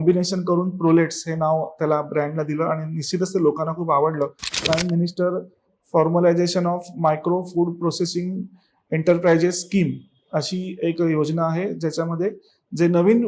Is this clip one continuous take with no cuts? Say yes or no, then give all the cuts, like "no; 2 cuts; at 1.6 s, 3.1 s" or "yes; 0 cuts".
no; 1 cut; at 4.5 s